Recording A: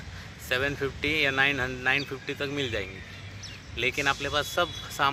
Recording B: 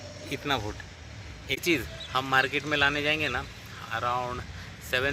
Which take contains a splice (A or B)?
B